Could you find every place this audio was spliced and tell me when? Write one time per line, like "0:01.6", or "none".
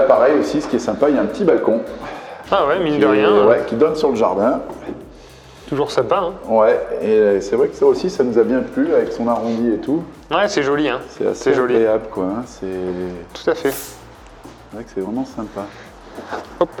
none